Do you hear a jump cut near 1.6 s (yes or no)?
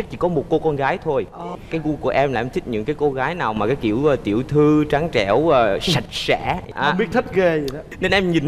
yes